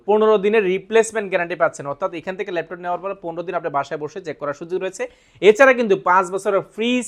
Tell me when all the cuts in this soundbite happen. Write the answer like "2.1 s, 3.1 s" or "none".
none